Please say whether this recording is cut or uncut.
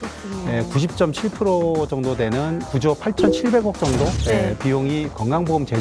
cut